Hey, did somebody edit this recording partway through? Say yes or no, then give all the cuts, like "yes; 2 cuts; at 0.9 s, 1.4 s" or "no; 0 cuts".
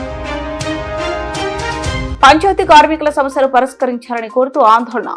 yes; 1 cut; at 2.1 s